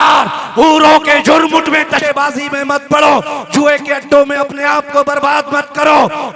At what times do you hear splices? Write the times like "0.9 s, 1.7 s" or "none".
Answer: 2.0 s